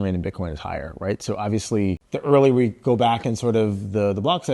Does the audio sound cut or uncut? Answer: cut